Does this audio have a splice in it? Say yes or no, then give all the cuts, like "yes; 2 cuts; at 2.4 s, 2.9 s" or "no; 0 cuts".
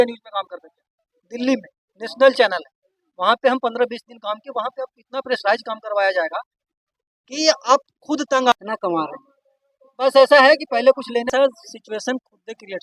yes; 2 cuts; at 8.5 s, 11.2 s